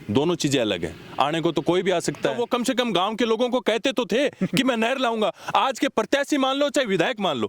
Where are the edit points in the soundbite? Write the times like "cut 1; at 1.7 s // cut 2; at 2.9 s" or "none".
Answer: cut 1; at 2.4 s

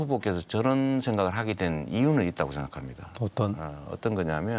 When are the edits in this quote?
none

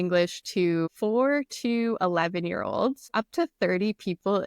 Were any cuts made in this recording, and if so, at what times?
cut 1; at 0.9 s // cut 2; at 3.0 s

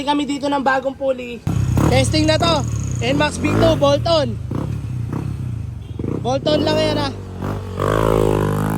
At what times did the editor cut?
cut 1; at 1.5 s

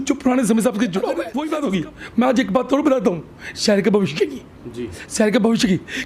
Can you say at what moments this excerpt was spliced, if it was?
cut 1; at 1.3 s

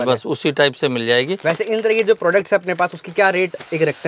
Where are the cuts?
none

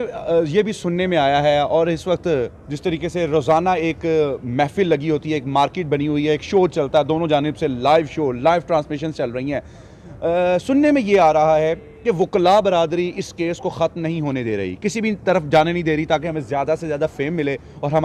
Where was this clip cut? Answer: none

